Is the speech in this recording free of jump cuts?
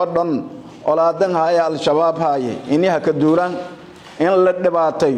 yes; 0 cuts

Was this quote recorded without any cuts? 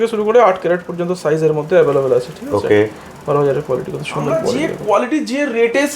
no; 1 cut; at 4.7 s

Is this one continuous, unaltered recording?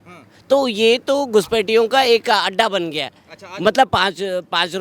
yes; 0 cuts

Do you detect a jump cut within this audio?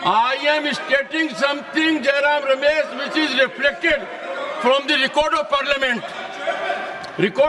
no; 0 cuts

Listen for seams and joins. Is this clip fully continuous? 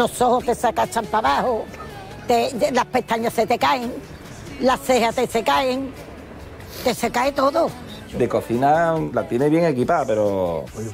no; 2 cuts; at 8.0 s, 9.0 s

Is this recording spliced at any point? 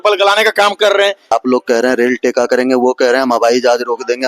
yes; 1 cut; at 1.3 s

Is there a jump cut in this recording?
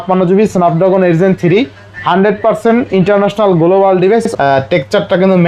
yes; 1 cut; at 4.2 s

